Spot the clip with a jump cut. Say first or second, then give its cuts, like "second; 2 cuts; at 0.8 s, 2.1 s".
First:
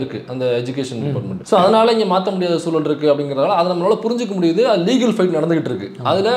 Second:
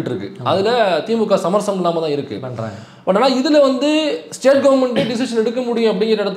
first; 1 cut; at 1.3 s